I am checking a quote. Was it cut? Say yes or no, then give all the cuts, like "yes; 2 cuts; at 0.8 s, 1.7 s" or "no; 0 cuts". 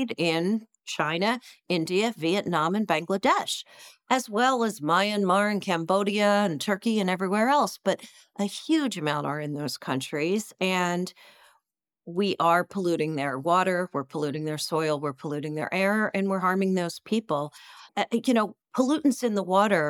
no; 0 cuts